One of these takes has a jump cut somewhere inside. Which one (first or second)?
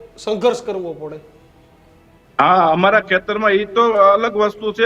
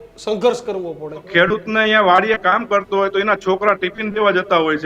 second